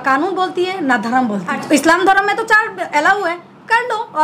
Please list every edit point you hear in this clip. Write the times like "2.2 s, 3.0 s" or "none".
1.6 s